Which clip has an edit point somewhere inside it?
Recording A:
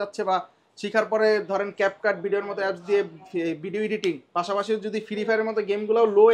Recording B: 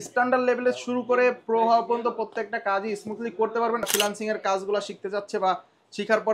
B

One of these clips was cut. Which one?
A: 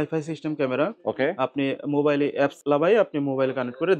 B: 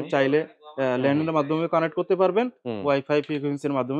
A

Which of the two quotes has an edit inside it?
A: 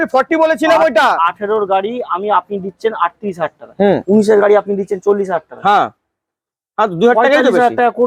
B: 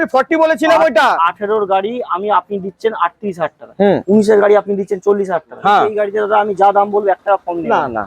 B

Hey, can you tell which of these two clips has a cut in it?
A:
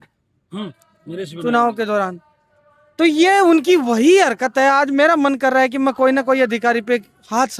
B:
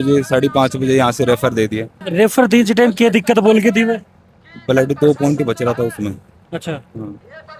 B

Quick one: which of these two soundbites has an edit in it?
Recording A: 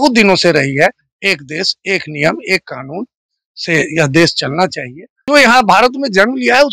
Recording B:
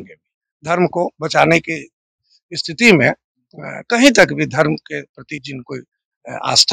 A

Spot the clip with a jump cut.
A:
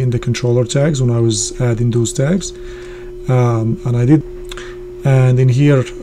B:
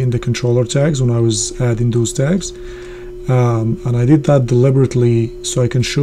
A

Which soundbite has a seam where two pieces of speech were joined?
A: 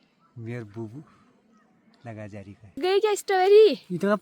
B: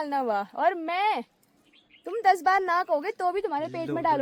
A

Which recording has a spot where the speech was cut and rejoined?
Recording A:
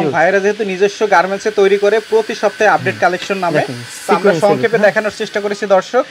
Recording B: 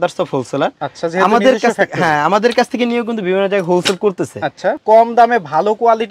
B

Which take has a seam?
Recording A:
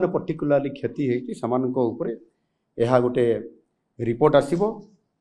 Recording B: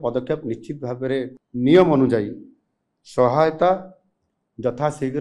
B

